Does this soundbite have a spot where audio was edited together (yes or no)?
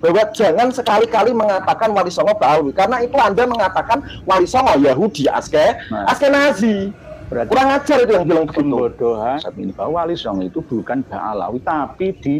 yes